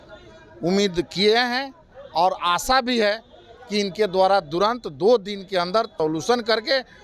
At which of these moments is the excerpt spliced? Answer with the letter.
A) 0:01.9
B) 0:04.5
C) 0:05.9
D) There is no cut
C